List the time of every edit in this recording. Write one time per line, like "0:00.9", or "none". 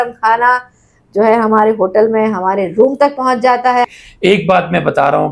0:03.8